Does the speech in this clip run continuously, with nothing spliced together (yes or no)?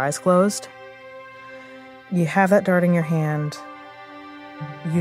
yes